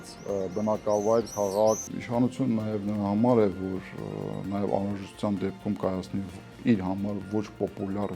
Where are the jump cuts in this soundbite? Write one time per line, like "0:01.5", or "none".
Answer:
0:01.9